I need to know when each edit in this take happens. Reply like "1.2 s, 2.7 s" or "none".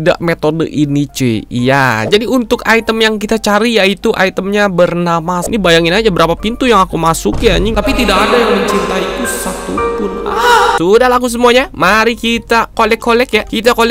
2.1 s, 5.5 s, 10.8 s